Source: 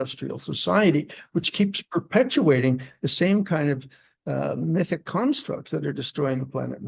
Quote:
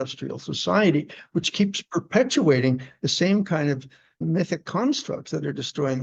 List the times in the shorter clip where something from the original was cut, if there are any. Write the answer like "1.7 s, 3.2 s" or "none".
4.2 s